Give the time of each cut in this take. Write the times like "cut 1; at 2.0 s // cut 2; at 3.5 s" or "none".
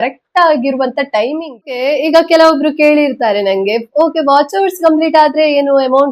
cut 1; at 1.8 s

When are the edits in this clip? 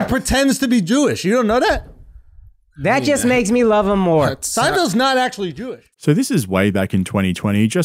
none

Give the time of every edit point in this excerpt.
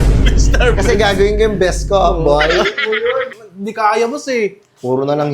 cut 1; at 3.3 s

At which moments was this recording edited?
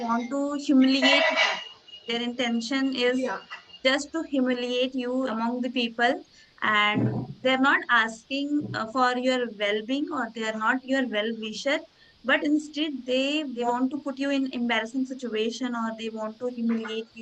cut 1; at 5.3 s // cut 2; at 13.7 s

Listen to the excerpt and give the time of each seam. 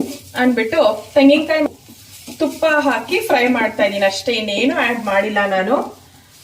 cut 1; at 1.7 s

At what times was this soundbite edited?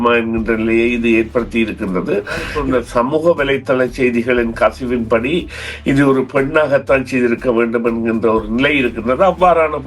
cut 1; at 2.5 s

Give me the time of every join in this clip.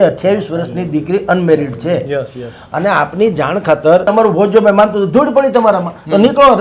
cut 1; at 4.1 s

